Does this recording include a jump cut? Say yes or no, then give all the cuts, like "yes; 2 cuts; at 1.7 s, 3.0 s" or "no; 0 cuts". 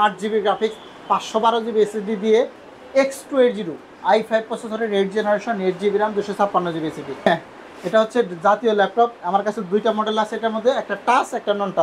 yes; 2 cuts; at 2.6 s, 7.3 s